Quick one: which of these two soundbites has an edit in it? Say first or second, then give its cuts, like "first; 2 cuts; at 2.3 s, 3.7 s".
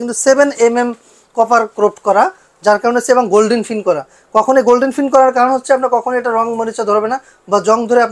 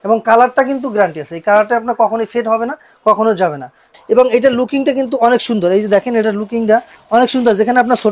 second; 1 cut; at 3.9 s